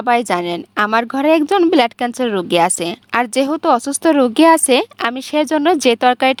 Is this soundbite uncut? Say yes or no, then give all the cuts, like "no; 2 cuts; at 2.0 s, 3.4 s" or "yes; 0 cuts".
yes; 0 cuts